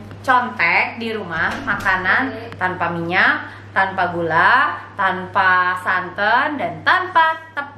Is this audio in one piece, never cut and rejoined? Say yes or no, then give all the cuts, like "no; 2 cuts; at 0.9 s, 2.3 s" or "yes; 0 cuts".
yes; 0 cuts